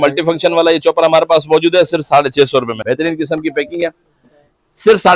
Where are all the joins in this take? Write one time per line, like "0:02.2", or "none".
0:02.8